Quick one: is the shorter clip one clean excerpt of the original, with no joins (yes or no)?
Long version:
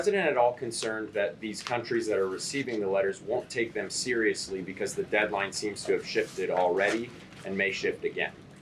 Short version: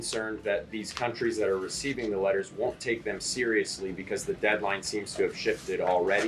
yes